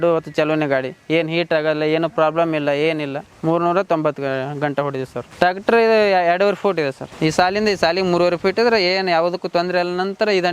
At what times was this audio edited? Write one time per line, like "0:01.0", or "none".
0:03.2
0:05.2
0:07.1